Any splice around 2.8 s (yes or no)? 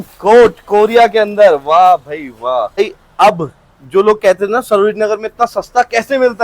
yes